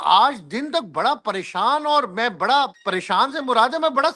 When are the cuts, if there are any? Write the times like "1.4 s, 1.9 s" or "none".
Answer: 2.8 s